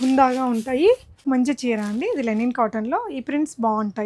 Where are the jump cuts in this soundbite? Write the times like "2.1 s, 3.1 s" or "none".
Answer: 1.2 s